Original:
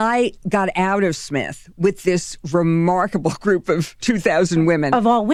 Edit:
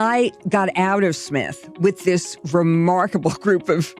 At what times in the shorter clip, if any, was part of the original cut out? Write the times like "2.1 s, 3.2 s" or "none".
none